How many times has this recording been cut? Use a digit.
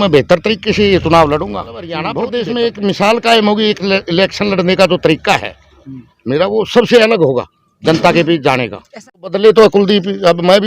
2